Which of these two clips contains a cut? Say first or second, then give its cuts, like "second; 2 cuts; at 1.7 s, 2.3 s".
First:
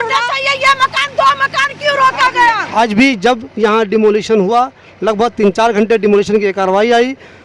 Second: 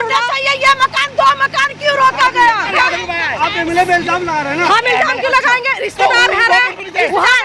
first; 1 cut; at 2.6 s